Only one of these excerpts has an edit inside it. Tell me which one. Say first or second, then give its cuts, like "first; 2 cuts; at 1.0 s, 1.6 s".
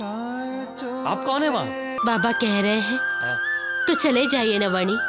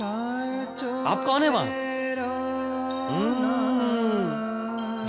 first; 1 cut; at 2.0 s